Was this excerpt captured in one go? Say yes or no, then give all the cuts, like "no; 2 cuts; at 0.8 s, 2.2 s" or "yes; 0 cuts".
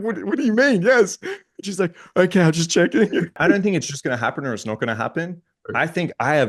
no; 1 cut; at 3.4 s